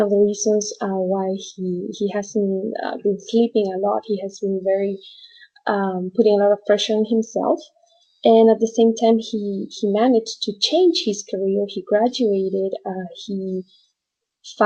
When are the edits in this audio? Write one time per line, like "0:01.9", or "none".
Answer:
none